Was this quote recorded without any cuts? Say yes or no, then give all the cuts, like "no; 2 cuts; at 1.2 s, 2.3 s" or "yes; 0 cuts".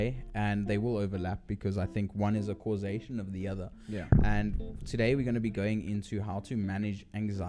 yes; 0 cuts